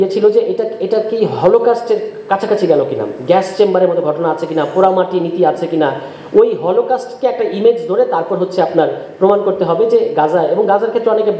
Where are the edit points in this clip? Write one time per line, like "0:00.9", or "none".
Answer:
none

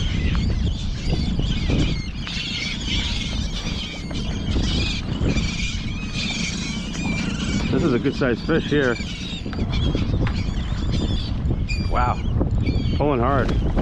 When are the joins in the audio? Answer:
0:11.1

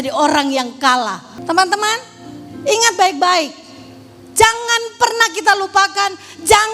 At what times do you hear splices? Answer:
0:01.3

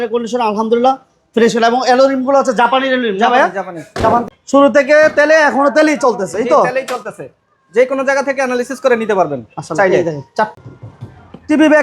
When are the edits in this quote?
0:04.3
0:10.6

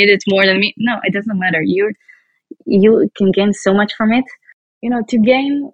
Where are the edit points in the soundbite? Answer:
0:04.7

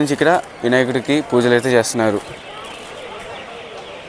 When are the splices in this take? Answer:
none

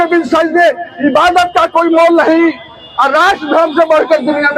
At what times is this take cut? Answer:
none

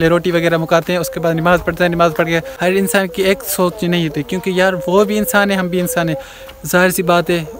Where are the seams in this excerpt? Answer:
0:02.5

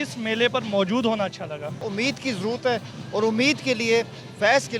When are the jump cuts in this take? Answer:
0:01.9

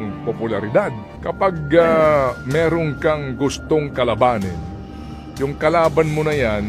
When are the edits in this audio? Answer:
0:01.1

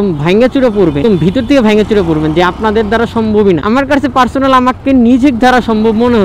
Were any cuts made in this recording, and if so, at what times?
0:01.0

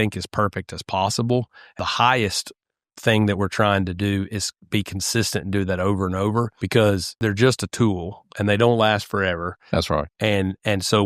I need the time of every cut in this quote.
0:01.6
0:06.6
0:07.1

